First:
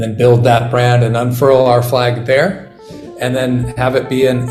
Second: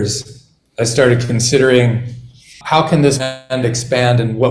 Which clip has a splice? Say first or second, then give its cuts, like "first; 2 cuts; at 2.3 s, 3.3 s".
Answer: second; 1 cut; at 2.5 s